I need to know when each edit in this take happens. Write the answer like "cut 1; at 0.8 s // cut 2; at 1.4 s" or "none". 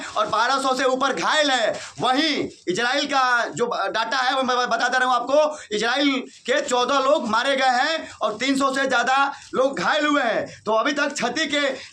none